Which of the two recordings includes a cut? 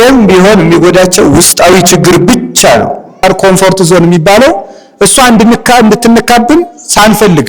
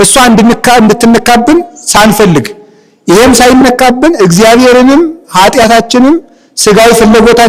first; 1 cut; at 3.2 s

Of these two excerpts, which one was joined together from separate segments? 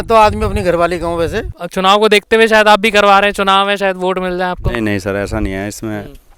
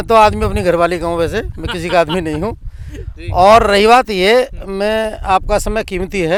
first; 1 cut; at 1.6 s

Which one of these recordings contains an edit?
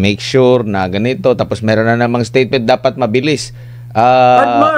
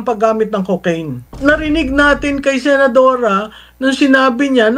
second; 1 cut; at 1.3 s

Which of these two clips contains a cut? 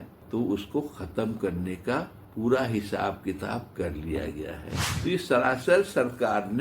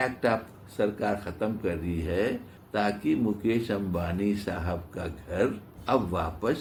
first; 2 cuts; at 2.2 s, 4.9 s

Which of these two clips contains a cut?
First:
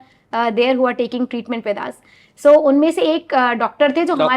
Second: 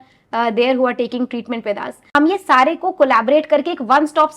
second; 1 cut; at 2.1 s

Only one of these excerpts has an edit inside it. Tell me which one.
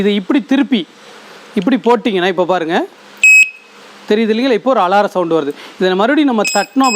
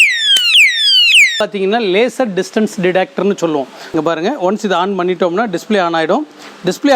second; 1 cut; at 1.4 s

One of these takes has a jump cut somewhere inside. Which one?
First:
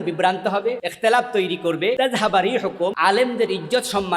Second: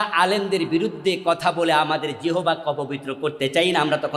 first; 3 cuts; at 0.9 s, 2.0 s, 3.0 s

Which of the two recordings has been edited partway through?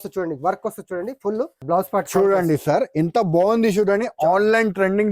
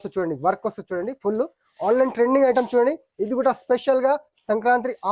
first; 1 cut; at 1.6 s

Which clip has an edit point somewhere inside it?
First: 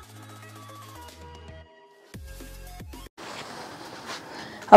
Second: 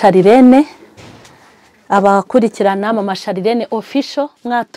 first; 1 cut; at 3.1 s

